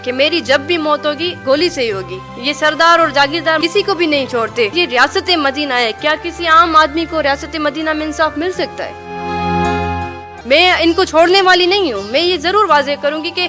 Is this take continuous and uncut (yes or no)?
no